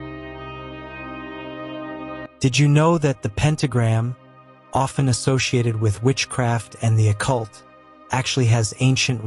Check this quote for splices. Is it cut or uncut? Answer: cut